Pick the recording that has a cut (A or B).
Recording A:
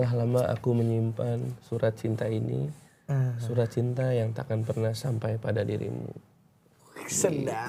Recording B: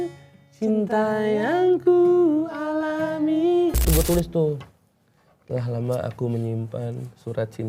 B